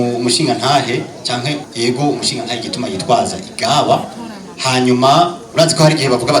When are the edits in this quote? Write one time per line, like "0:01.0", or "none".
0:01.7
0:05.4